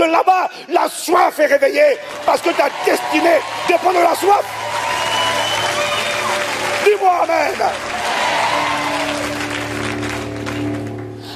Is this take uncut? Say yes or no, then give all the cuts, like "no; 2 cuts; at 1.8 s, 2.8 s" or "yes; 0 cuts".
yes; 0 cuts